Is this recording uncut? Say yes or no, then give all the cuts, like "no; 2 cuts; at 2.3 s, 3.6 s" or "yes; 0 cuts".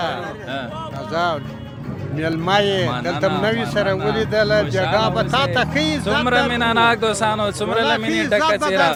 yes; 0 cuts